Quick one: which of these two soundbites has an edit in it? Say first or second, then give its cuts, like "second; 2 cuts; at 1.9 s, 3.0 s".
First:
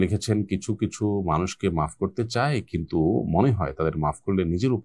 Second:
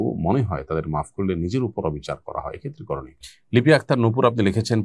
second; 1 cut; at 3.2 s